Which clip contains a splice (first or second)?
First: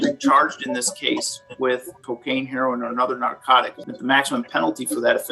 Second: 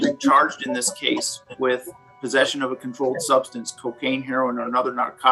first